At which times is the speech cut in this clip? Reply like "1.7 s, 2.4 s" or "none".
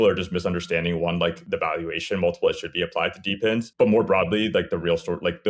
1.4 s, 3.7 s